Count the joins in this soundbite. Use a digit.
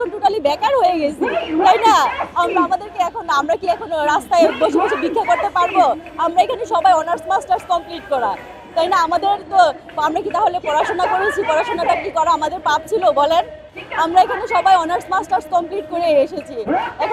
0